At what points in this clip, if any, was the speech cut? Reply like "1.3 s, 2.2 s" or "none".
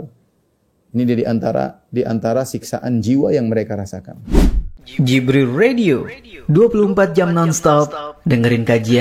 4.2 s